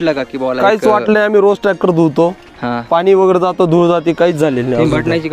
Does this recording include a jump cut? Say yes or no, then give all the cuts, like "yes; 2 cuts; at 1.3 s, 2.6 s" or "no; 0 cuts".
no; 0 cuts